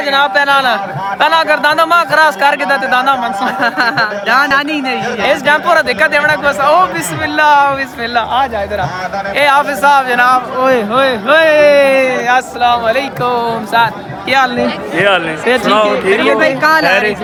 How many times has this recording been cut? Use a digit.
0